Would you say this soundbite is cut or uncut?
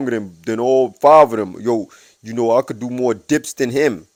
uncut